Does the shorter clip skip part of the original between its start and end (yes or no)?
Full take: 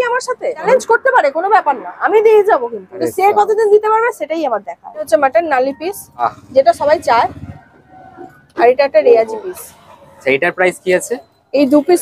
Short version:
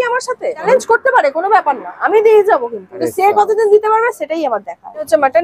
no